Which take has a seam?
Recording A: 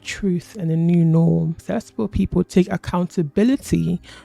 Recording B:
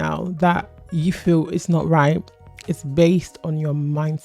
A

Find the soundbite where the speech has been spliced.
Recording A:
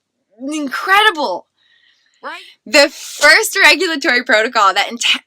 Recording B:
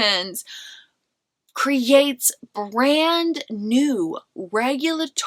A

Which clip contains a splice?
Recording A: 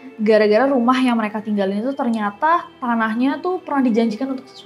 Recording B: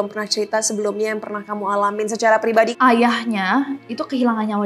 B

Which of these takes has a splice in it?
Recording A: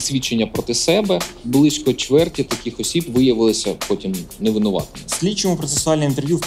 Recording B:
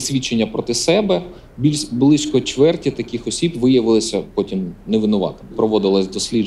A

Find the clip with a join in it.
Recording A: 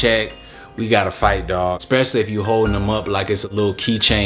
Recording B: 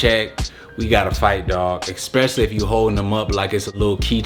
A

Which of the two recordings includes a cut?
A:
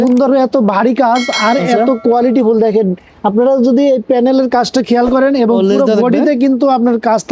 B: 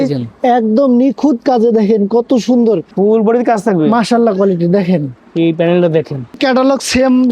B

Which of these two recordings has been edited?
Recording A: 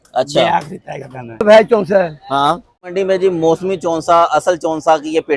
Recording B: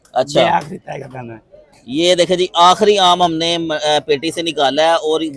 A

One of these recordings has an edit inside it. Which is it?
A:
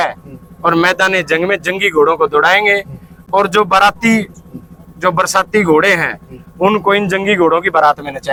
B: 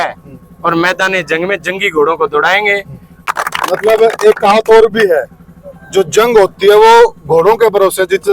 B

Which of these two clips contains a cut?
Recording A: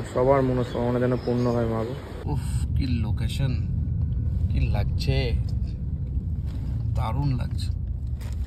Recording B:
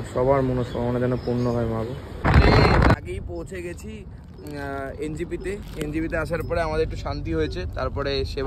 A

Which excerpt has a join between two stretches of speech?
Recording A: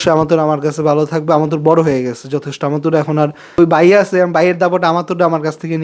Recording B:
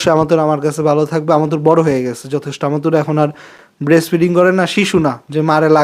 A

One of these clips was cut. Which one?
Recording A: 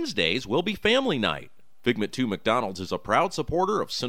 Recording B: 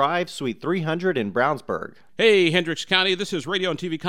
B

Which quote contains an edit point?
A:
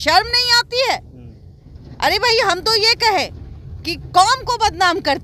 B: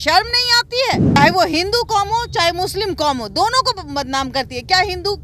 B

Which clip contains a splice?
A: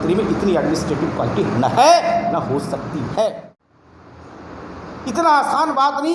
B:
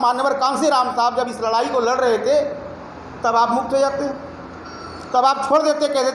A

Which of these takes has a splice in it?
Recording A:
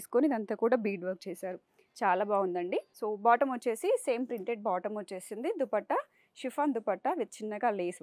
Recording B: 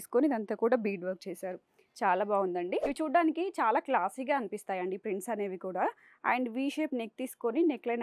B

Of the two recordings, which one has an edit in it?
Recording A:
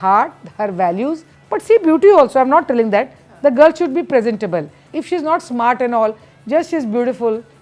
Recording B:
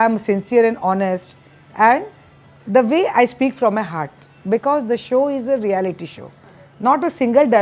A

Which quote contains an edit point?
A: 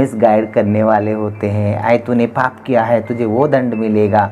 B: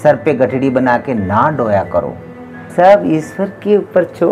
B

